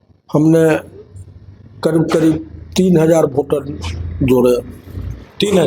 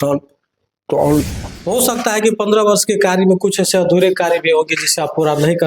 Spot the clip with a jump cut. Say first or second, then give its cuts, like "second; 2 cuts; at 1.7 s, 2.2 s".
second; 1 cut; at 1.2 s